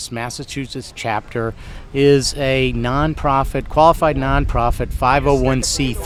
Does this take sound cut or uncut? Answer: uncut